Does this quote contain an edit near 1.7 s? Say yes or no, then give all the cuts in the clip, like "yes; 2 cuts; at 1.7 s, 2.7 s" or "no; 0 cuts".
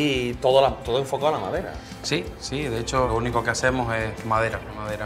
no; 1 cut; at 3.1 s